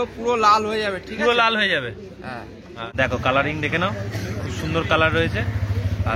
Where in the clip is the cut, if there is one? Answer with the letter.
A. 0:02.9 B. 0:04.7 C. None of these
A